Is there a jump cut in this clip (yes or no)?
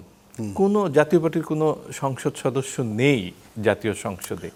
no